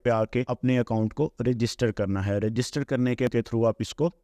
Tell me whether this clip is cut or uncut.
cut